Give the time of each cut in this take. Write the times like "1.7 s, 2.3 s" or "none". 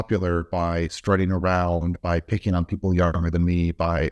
none